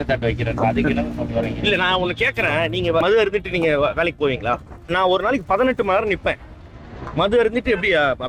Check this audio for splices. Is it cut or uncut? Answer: cut